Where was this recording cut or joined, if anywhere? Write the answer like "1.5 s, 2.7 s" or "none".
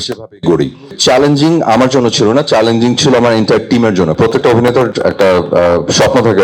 0.9 s, 4.2 s